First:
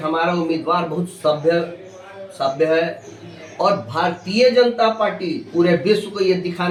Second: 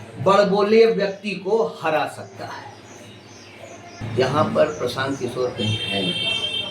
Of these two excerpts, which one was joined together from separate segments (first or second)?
second